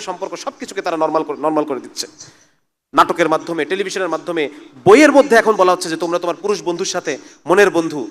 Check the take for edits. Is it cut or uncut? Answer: uncut